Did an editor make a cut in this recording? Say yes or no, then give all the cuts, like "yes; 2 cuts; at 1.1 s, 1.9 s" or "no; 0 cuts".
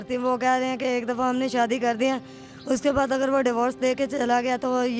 no; 0 cuts